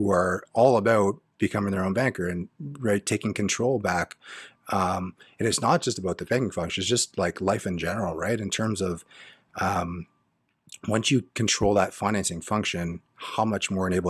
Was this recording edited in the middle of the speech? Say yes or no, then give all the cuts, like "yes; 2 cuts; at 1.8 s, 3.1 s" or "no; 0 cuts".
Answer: no; 0 cuts